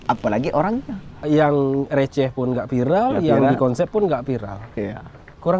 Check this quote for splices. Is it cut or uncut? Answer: cut